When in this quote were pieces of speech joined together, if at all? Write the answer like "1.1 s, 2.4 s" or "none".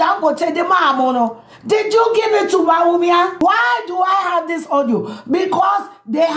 3.3 s